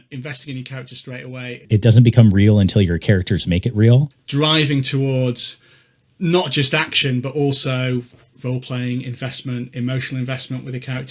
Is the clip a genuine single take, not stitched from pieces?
no; 2 cuts; at 1.6 s, 4.2 s

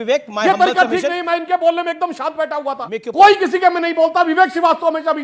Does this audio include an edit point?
yes; 1 cut; at 2.8 s

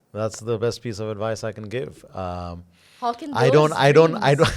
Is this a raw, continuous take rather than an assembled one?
yes; 0 cuts

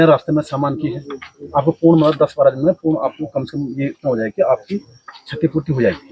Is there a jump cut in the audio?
no; 0 cuts

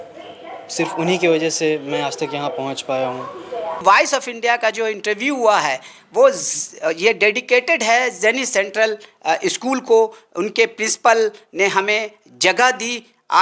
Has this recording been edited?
yes; 1 cut; at 3.8 s

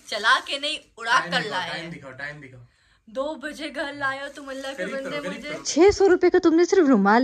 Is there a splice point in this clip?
yes; 1 cut; at 5.7 s

